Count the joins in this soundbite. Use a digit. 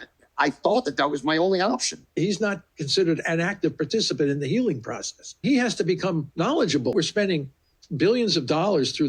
3